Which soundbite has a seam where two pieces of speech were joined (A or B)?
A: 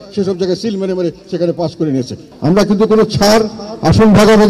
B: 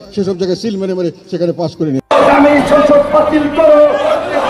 B